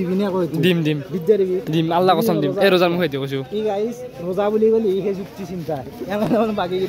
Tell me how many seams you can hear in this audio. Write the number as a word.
zero